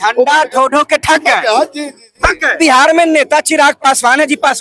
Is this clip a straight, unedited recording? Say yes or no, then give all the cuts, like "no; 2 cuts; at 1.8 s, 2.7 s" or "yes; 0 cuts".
no; 1 cut; at 2.6 s